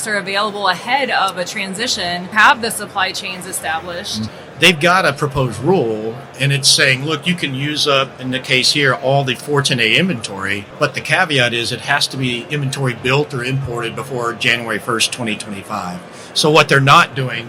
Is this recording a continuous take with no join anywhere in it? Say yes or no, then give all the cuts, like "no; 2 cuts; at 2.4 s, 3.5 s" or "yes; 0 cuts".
no; 3 cuts; at 2.3 s, 4.3 s, 10.6 s